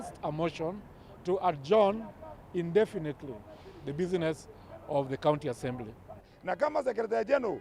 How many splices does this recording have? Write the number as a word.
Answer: one